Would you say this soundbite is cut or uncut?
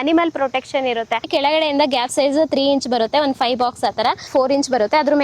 cut